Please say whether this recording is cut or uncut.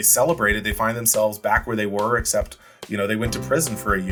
uncut